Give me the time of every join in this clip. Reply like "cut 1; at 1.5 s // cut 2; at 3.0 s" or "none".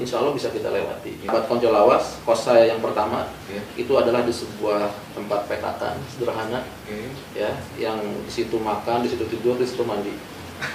cut 1; at 1.3 s